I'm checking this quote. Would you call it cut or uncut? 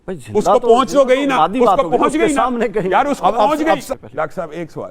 cut